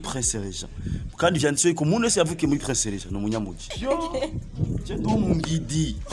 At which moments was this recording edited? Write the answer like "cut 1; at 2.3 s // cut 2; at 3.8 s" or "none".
cut 1; at 3.6 s